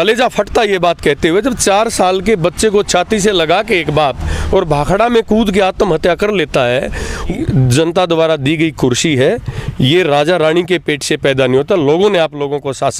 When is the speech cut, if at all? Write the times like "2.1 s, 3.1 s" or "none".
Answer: 7.3 s